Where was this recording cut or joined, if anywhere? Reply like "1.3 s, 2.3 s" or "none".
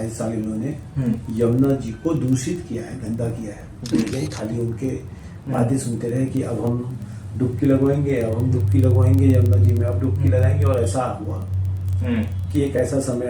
4.1 s

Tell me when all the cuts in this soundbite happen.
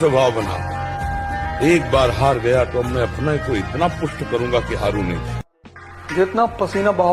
5.7 s

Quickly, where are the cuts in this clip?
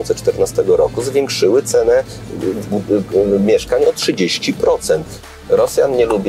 5.3 s

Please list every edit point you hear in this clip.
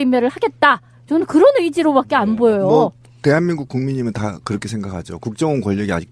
3.4 s

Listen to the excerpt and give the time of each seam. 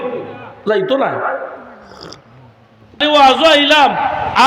3.0 s

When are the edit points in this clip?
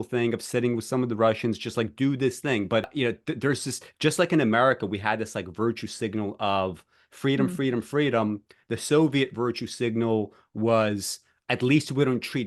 2.9 s

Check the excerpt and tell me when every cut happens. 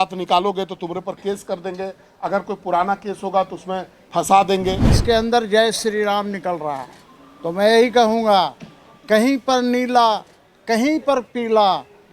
4.9 s

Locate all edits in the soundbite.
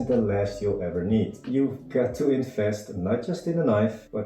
1.4 s

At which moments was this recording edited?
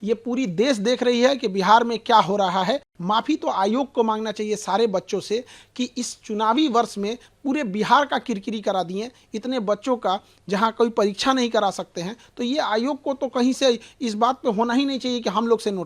2.9 s

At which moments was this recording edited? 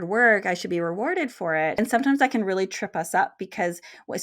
1.8 s

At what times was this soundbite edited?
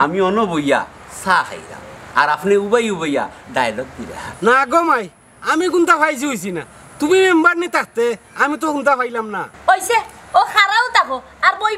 4.2 s, 9.4 s

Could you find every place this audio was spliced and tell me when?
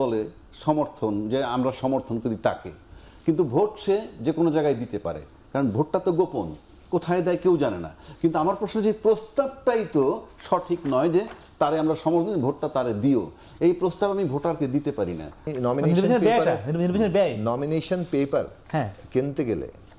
15.5 s

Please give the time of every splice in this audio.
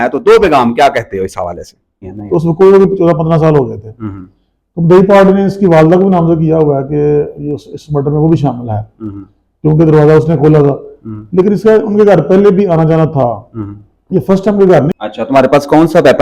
2.1 s, 14.9 s

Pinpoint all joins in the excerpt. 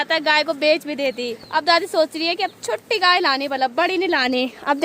1.3 s

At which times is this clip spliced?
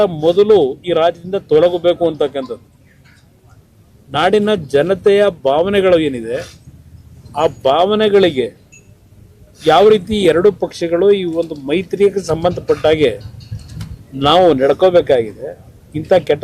none

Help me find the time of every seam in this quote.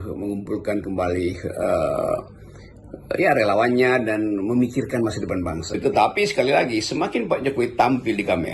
5.7 s

